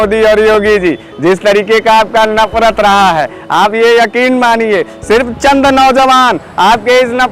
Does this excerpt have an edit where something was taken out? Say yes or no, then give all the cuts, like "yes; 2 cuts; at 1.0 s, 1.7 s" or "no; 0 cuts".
no; 0 cuts